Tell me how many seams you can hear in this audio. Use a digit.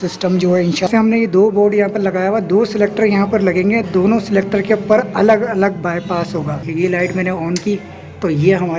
2